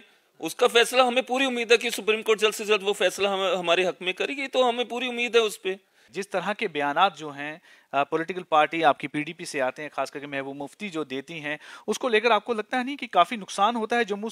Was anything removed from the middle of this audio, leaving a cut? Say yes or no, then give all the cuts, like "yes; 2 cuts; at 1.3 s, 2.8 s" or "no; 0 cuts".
yes; 1 cut; at 6.1 s